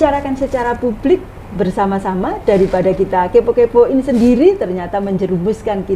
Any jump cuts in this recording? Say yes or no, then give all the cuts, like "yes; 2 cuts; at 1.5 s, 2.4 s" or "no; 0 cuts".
no; 0 cuts